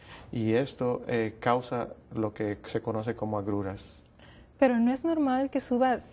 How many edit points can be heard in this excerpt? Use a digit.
1